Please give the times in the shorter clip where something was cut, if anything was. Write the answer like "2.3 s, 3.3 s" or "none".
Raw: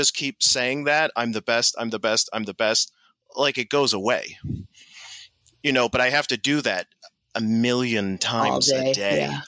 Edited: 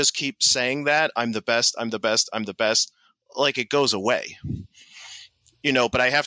none